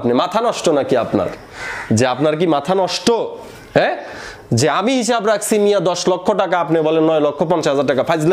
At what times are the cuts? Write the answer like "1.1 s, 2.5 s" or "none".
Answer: none